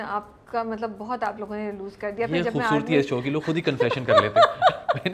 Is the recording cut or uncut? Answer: uncut